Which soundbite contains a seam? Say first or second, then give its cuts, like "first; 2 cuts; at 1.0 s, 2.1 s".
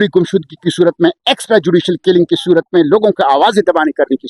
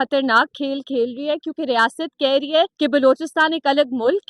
second; 1 cut; at 2.7 s